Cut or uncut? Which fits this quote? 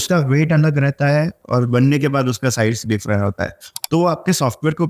cut